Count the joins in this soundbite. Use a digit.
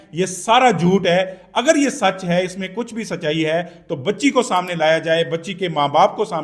0